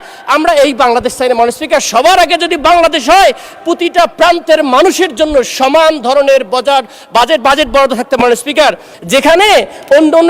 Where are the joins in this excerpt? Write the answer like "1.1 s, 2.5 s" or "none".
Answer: 8.9 s